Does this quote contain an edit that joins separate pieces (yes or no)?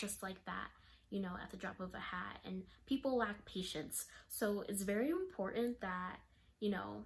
no